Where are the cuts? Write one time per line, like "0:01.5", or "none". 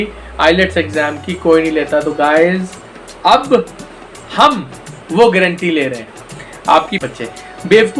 0:07.0

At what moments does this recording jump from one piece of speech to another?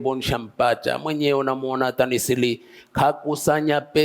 none

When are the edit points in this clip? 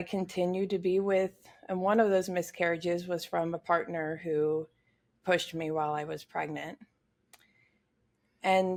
none

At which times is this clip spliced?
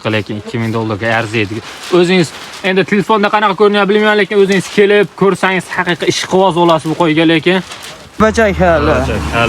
0:08.2

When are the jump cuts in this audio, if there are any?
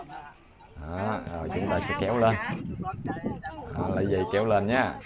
none

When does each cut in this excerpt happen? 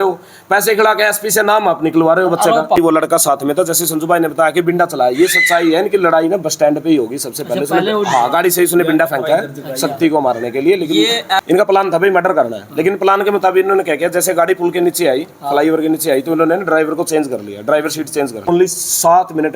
0:02.8
0:11.4
0:18.5

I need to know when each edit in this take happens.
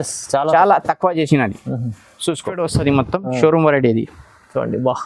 0:02.6

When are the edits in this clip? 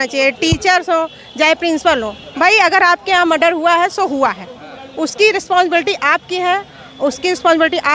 none

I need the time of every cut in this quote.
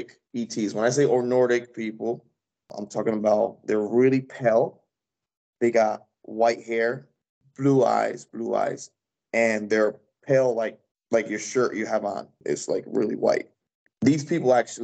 0:12.4
0:13.8

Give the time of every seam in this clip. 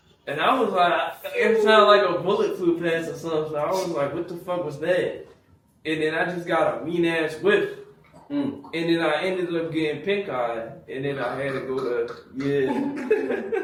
none

